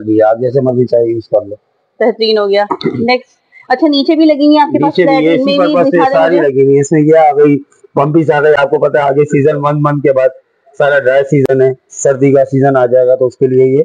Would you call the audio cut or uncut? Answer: uncut